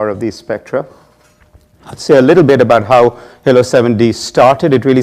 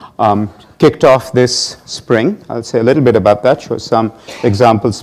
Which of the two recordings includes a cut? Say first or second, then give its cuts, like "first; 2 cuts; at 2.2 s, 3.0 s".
second; 1 cut; at 1.6 s